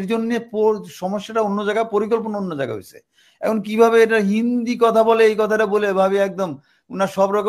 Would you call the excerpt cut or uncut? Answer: uncut